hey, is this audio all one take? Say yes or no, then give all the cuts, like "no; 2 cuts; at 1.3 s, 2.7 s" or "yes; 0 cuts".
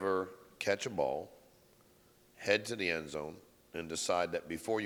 yes; 0 cuts